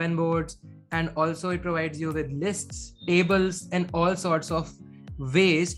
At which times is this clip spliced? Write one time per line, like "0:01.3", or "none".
none